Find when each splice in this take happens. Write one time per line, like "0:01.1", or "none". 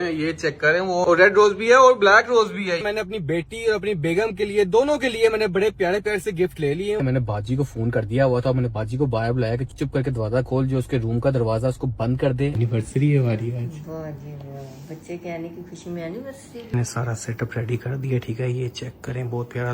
0:01.0
0:02.8
0:07.0
0:12.5
0:16.7

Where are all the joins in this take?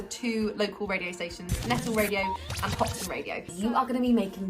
0:03.5

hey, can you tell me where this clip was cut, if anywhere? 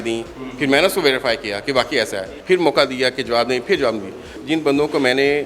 0:02.4
0:04.4

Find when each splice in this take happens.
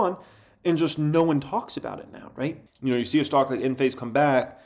0:02.7

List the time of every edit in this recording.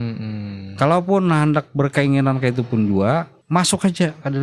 0:03.4

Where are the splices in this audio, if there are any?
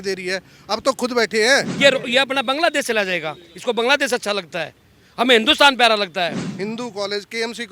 0:01.7
0:06.4

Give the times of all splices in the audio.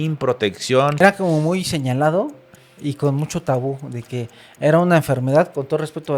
0:01.0

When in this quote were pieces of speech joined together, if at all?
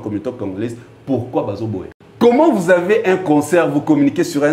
0:02.0

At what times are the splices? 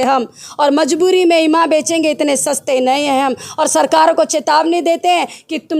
none

